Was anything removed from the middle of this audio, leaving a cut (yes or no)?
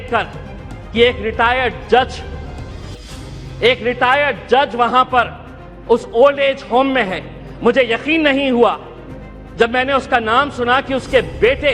no